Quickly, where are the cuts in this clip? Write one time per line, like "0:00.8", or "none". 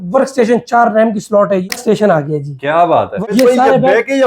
0:01.7
0:03.2